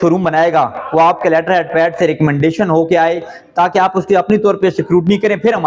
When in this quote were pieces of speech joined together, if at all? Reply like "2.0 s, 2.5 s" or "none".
none